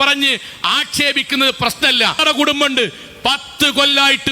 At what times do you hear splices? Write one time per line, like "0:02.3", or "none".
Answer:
0:02.2